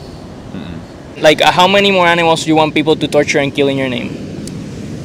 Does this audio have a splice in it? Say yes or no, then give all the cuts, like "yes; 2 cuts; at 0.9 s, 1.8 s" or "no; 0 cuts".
yes; 1 cut; at 1.1 s